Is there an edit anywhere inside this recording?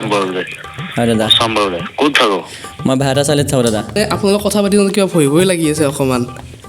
yes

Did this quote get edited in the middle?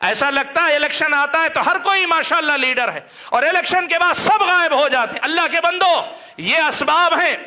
no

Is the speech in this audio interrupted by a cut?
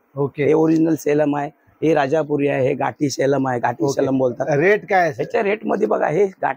no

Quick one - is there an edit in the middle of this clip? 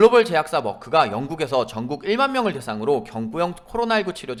no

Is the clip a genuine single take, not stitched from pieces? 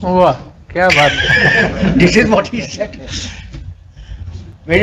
yes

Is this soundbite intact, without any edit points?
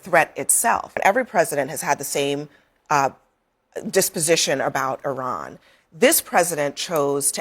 no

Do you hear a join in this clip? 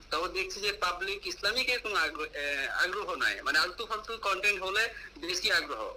no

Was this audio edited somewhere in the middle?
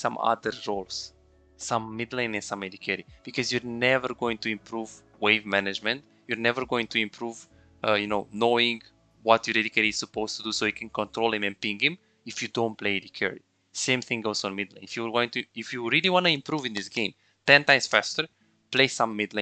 no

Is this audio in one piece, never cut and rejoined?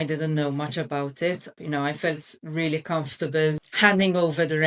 yes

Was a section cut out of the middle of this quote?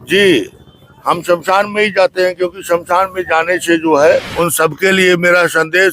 yes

